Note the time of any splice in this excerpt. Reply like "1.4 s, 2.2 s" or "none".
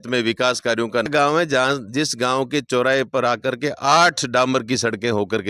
1.1 s